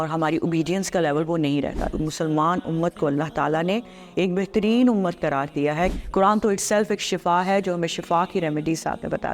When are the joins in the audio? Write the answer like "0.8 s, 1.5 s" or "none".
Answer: 1.9 s, 5.9 s